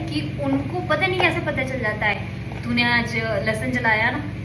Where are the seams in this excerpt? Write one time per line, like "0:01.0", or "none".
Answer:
none